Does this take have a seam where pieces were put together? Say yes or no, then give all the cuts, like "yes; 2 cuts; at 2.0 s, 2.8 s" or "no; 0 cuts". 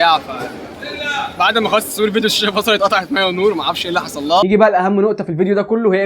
yes; 1 cut; at 4.4 s